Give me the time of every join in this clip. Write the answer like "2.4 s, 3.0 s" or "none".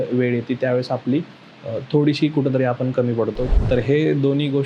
3.5 s